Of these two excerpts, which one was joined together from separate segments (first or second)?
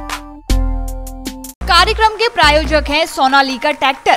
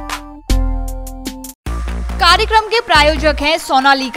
first